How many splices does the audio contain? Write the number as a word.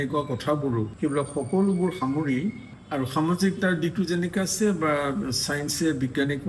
two